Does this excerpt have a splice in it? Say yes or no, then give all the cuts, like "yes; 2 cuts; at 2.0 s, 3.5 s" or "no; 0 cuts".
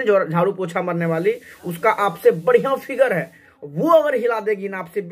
no; 0 cuts